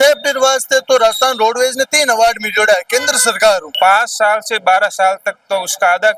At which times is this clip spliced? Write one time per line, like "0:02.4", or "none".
0:03.7